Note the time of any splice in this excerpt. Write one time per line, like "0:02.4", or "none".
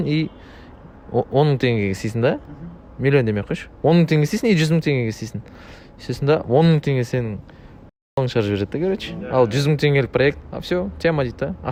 none